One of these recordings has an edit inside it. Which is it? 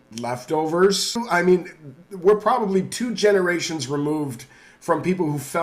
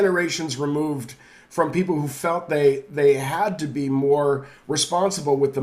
first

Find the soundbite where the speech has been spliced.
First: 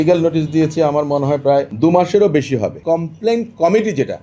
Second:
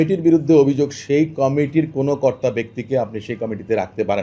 first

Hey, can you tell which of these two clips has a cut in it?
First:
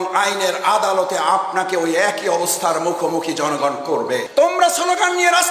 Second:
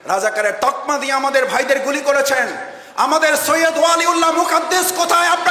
first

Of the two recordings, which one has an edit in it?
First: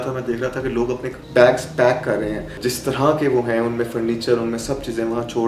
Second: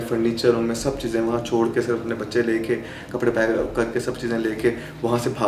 first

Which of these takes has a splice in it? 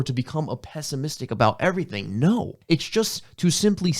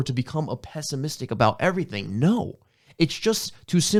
first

